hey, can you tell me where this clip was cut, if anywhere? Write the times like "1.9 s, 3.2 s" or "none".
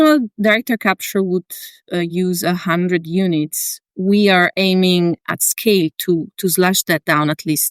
5.2 s